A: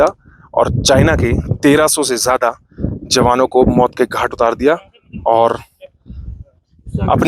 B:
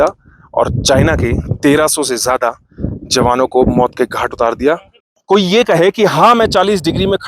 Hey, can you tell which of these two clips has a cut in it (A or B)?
B